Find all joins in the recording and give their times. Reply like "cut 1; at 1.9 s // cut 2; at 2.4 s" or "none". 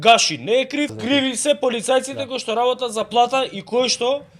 cut 1; at 0.9 s